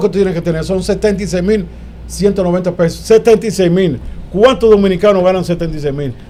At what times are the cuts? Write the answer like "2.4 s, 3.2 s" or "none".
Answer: none